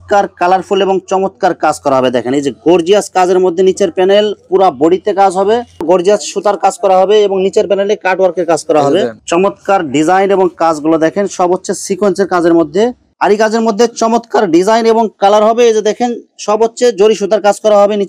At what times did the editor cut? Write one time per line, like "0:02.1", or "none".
0:05.7
0:09.2
0:13.1